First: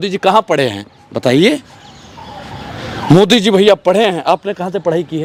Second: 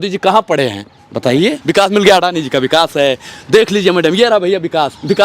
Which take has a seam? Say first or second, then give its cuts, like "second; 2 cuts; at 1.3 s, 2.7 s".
second; 1 cut; at 1.6 s